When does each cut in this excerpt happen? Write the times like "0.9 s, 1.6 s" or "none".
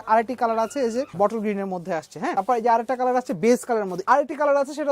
1.1 s, 2.3 s, 4.0 s